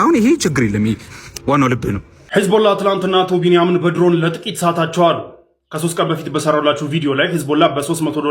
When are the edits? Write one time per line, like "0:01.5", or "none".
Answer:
0:02.2